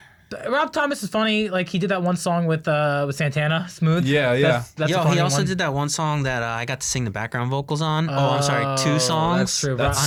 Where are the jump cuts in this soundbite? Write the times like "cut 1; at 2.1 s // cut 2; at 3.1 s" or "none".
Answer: none